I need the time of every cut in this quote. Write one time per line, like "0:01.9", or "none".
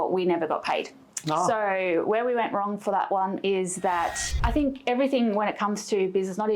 0:04.4